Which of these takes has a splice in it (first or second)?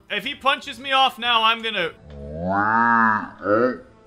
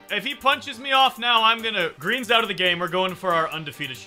second